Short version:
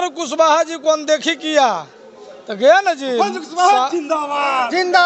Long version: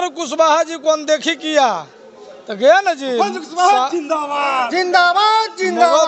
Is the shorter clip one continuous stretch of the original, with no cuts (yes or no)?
yes